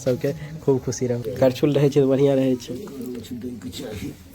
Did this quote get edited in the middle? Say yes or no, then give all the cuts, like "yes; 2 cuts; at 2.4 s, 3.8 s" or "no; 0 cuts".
yes; 1 cut; at 1.3 s